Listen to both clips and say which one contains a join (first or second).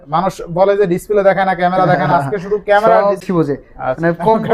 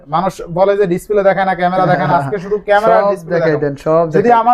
first